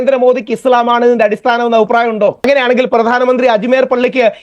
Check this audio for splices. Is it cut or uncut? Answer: cut